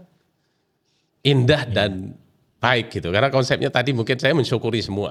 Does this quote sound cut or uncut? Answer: uncut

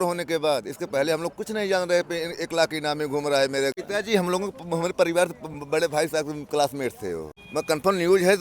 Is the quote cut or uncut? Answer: cut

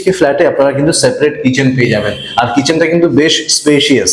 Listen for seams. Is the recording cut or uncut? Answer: uncut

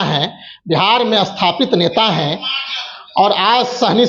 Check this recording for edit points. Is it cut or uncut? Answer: uncut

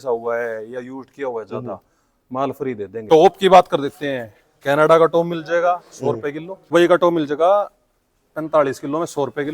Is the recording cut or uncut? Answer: cut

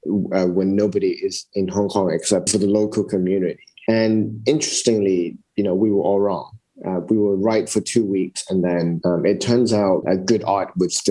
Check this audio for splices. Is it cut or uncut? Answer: cut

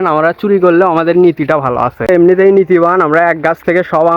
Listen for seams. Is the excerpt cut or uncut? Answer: cut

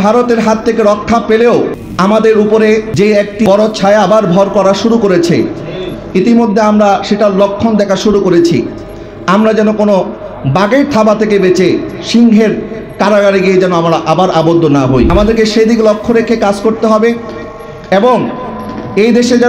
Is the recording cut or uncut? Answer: cut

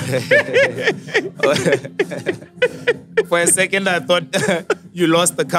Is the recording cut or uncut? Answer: uncut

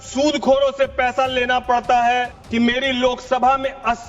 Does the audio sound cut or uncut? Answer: cut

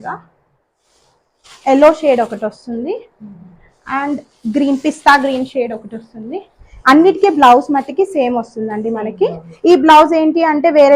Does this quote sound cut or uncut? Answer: uncut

